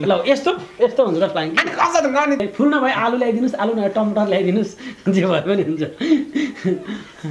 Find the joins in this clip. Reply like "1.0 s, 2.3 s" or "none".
2.4 s